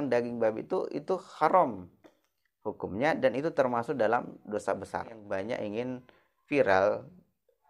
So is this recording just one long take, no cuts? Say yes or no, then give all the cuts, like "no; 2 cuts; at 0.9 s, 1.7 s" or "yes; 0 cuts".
no; 1 cut; at 5.2 s